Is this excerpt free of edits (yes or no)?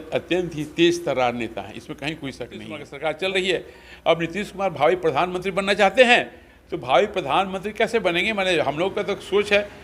no